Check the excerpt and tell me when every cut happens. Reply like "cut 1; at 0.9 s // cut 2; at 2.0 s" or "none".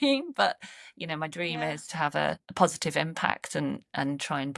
cut 1; at 1.9 s